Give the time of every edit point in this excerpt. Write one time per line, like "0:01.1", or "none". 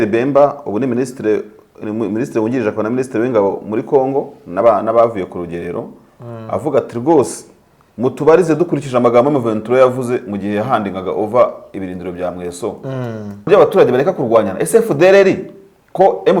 0:13.5